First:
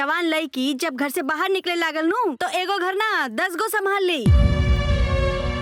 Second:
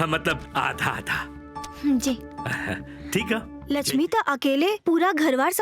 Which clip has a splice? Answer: second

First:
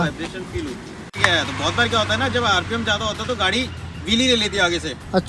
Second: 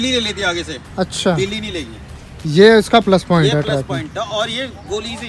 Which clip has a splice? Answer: first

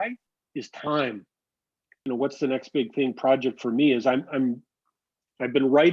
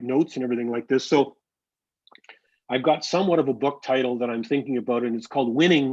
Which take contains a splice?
first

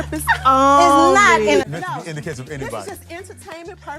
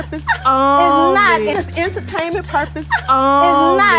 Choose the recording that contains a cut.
first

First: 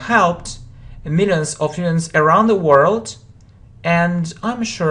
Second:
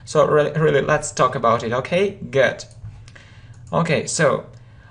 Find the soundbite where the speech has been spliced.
second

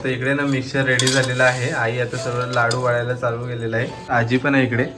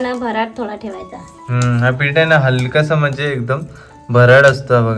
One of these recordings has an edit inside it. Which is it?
first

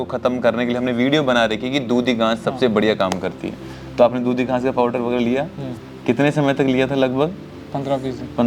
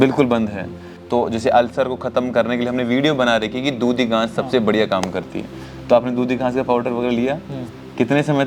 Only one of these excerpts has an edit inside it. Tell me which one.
second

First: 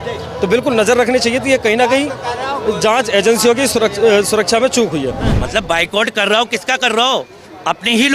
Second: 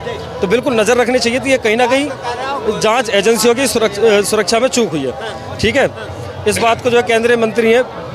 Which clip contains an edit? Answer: first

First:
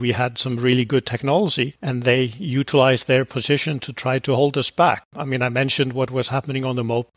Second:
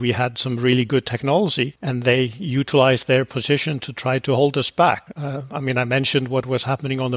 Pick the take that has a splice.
first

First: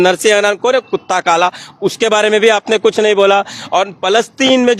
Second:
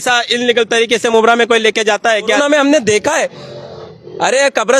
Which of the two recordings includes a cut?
second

